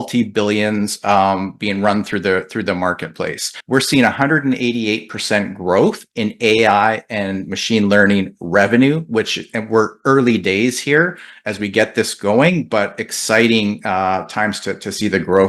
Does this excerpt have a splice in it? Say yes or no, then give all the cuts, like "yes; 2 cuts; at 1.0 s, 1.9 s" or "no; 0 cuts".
yes; 1 cut; at 3.5 s